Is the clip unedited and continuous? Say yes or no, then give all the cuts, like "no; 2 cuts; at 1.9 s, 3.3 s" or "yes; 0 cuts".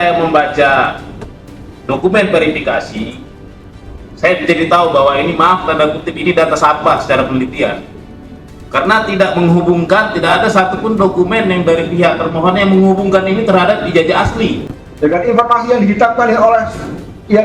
no; 1 cut; at 14.8 s